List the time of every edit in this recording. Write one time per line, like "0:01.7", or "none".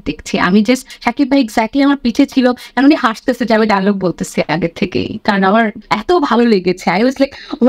0:00.9
0:05.8